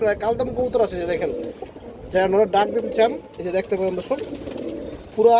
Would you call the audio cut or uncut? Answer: uncut